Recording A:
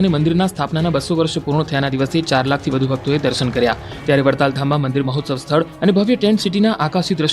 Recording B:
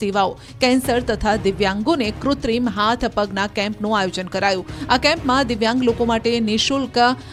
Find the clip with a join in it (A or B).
A